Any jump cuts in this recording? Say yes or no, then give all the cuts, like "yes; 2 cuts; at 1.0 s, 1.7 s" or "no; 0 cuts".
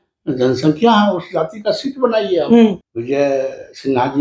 yes; 1 cut; at 2.9 s